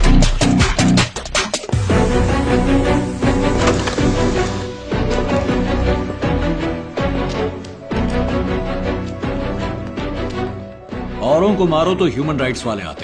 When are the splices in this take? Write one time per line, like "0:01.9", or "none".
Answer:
0:03.9